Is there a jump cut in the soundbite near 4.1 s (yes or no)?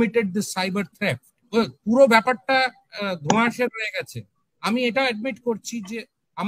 no